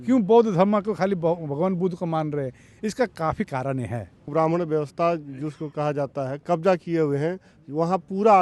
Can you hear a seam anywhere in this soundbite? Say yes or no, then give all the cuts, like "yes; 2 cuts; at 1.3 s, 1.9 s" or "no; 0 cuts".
yes; 1 cut; at 4.3 s